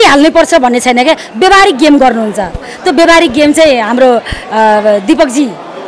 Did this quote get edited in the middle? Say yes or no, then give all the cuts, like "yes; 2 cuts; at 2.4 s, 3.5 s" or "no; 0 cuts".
no; 0 cuts